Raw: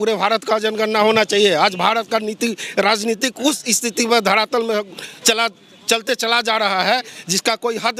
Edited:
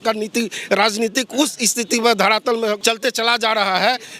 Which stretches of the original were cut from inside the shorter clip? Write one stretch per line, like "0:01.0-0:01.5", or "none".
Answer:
0:04.9-0:05.8